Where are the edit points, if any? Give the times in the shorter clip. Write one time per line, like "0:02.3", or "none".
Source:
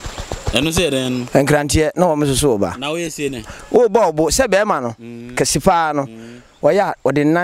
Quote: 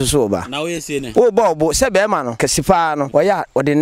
0:01.0
0:02.7